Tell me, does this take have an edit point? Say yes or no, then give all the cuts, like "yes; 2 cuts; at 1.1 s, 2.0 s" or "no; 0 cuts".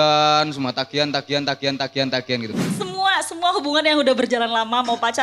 yes; 1 cut; at 2.6 s